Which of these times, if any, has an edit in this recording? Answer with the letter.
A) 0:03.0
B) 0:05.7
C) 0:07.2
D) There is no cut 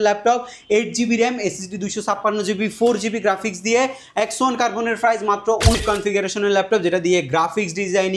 B